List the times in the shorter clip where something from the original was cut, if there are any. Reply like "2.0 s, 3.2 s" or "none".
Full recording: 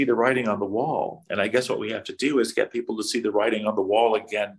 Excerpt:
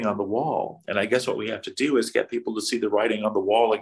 none